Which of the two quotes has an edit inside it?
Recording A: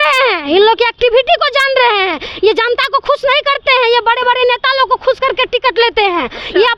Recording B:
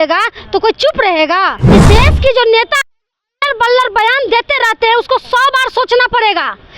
B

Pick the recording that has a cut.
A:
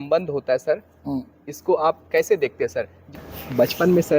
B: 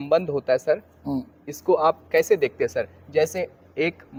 A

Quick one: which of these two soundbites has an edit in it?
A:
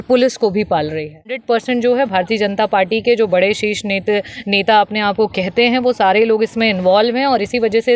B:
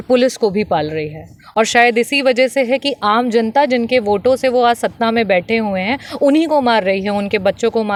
A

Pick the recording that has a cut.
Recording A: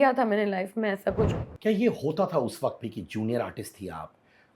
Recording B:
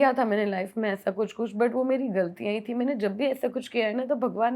A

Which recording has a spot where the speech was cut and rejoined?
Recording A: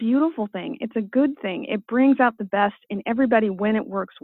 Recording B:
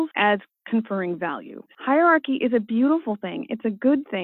B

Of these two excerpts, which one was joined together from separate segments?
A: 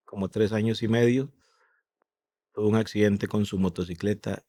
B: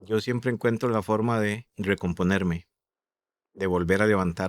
B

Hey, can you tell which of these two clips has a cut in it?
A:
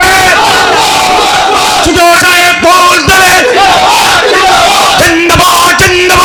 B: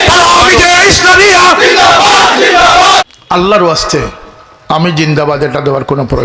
B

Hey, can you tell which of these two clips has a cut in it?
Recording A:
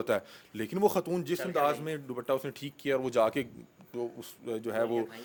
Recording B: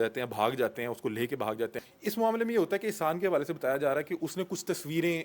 B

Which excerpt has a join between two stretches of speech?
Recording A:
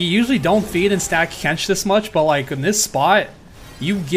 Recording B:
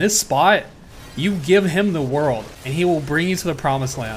B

